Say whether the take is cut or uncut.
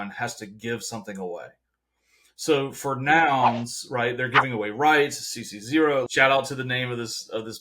cut